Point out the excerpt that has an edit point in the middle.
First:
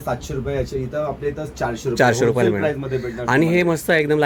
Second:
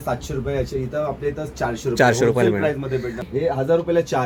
second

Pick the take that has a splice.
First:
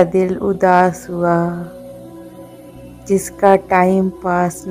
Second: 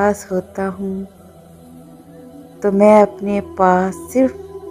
second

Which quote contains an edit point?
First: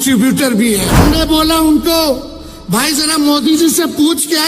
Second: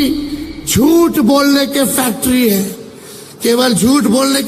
first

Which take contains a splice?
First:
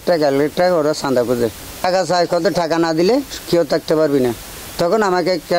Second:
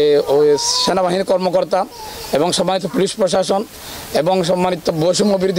first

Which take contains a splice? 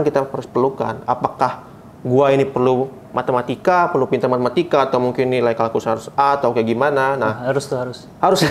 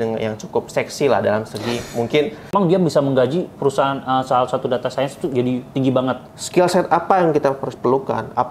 second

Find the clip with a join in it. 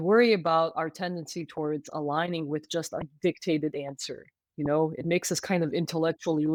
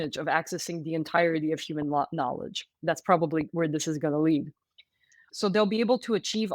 second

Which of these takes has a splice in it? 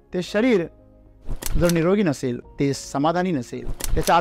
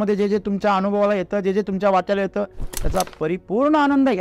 first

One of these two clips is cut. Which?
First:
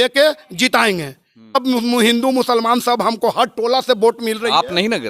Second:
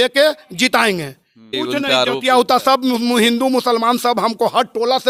first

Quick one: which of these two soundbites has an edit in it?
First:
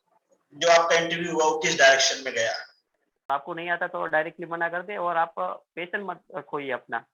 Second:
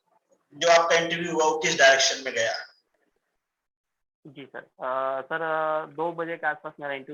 first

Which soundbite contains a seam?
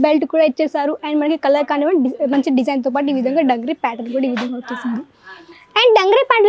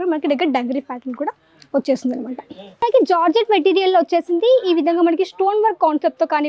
second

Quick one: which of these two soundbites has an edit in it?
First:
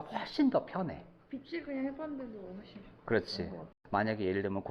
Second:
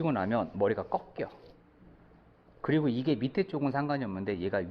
first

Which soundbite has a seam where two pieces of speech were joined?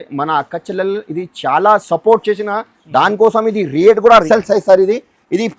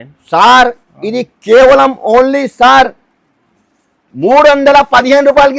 first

